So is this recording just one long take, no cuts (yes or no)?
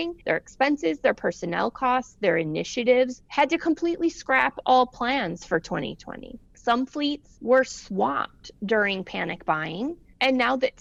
yes